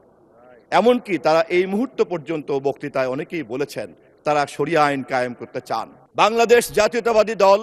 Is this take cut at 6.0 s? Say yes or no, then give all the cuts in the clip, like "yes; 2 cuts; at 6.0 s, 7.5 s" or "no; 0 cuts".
yes; 1 cut; at 6.0 s